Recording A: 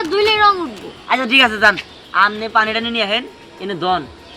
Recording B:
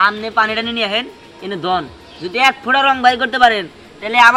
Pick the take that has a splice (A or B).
A